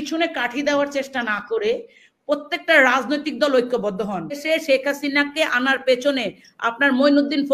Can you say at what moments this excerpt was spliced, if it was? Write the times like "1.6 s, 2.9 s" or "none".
4.4 s